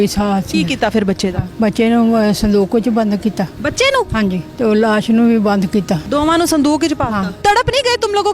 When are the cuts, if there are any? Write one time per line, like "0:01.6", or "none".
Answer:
0:01.4
0:04.2
0:06.0
0:07.3